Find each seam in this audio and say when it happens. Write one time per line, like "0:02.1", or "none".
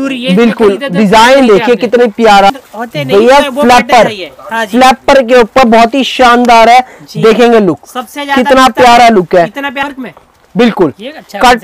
0:02.5
0:09.7